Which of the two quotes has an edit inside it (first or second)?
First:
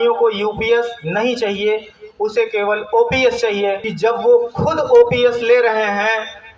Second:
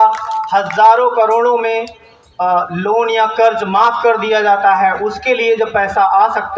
first